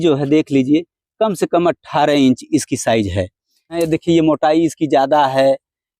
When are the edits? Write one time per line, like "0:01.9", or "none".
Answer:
0:03.8